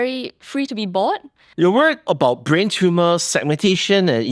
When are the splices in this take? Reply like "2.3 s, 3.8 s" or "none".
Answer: 1.4 s

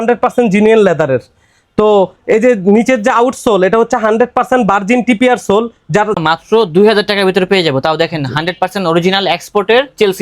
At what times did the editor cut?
6.2 s

